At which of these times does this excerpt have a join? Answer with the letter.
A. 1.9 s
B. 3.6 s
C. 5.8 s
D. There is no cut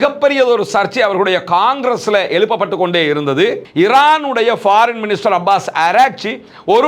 B